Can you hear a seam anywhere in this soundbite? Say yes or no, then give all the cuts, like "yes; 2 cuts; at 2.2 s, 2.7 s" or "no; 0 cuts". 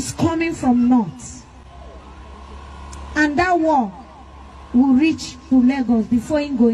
no; 0 cuts